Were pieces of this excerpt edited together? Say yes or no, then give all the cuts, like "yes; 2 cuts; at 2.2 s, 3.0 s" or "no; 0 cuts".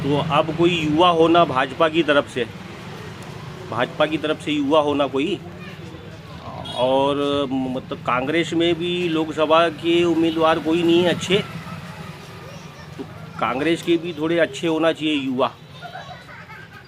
no; 0 cuts